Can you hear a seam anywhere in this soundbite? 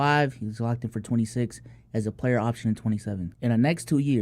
no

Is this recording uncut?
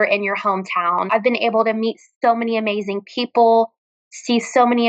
no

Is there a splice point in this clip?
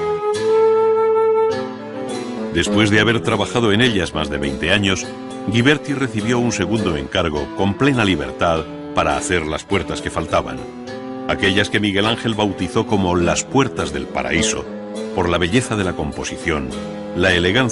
no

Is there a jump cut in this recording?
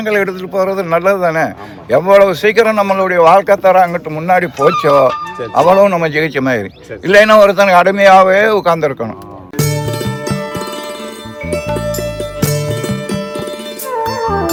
no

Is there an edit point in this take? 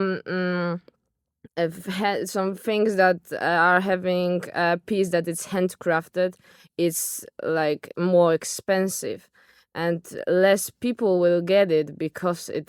no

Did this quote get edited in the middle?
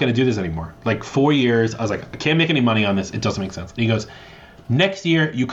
no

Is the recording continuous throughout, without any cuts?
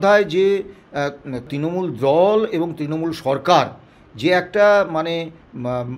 no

